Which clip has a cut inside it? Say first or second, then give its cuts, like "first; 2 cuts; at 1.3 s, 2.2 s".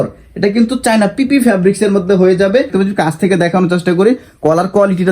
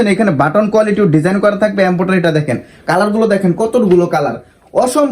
first; 1 cut; at 2.7 s